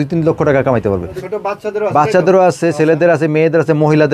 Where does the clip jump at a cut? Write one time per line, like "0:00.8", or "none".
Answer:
0:01.1